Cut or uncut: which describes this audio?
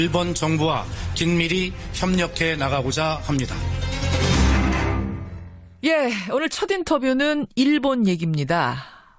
uncut